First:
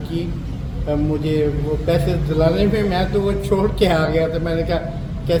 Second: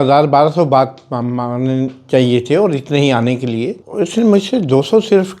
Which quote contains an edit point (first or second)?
second